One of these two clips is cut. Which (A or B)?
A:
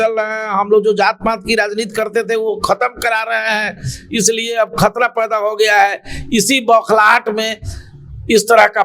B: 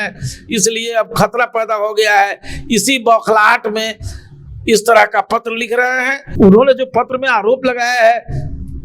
B